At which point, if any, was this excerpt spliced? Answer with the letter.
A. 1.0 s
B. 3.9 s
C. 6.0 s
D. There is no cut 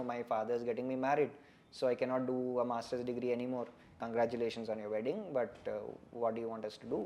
B